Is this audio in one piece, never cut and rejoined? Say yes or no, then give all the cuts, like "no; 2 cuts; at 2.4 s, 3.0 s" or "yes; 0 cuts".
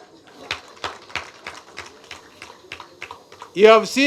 yes; 0 cuts